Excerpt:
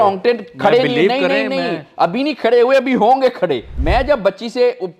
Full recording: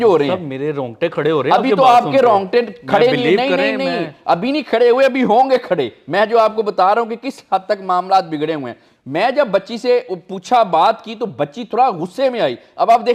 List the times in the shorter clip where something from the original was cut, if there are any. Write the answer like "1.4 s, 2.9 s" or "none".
3.7 s